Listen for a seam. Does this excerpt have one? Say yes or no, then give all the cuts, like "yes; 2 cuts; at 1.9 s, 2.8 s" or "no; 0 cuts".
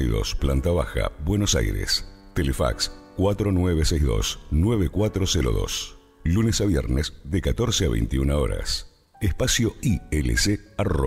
no; 0 cuts